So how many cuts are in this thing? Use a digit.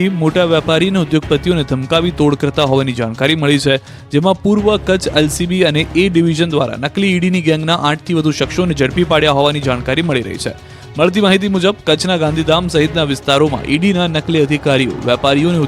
1